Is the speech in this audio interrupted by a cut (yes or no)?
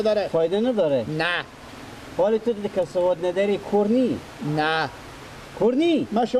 no